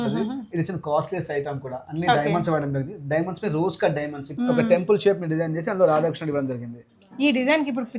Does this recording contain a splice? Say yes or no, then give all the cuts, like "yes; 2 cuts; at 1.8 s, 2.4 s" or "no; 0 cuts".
yes; 1 cut; at 4.2 s